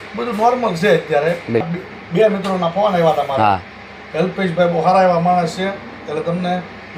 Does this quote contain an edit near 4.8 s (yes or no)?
no